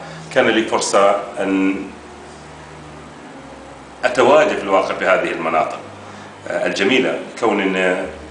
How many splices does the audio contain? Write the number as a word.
one